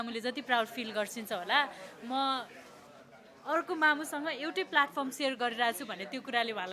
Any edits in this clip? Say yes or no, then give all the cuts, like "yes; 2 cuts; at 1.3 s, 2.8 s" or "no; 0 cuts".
no; 0 cuts